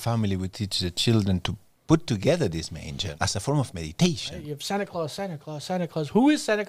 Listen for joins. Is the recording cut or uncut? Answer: cut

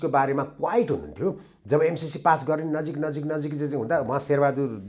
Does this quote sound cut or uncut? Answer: uncut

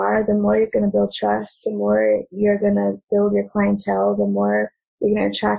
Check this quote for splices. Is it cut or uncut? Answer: uncut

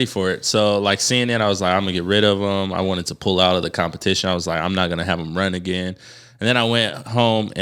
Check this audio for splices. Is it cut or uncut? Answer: uncut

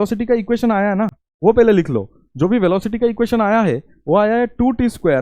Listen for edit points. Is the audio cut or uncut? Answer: cut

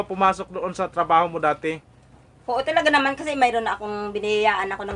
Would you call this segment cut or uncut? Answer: uncut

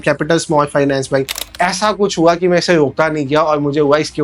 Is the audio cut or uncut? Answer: cut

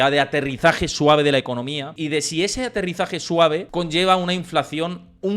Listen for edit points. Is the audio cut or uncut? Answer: cut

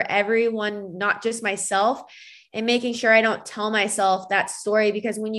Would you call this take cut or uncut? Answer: uncut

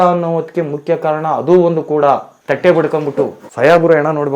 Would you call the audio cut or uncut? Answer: cut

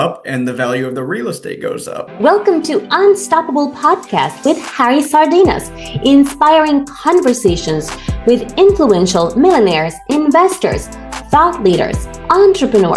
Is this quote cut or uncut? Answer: cut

